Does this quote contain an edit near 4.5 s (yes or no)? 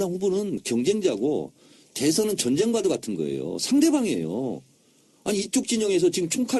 no